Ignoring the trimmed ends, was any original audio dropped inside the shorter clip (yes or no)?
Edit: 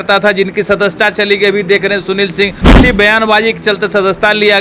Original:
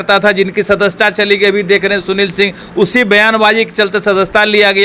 yes